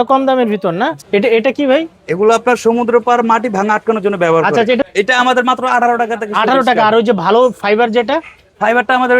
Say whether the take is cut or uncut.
cut